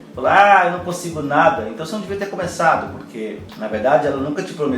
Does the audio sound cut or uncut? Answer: cut